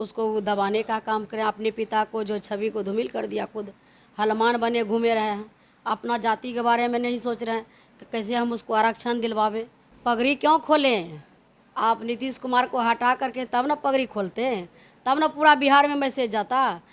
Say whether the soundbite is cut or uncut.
cut